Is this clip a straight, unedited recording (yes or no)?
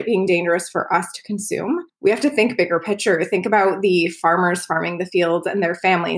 no